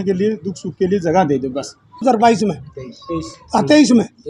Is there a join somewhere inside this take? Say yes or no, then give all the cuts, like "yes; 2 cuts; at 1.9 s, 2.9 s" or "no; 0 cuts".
yes; 1 cut; at 2.0 s